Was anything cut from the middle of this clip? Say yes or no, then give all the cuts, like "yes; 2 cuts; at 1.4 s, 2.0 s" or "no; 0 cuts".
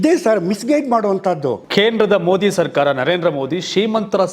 yes; 1 cut; at 1.6 s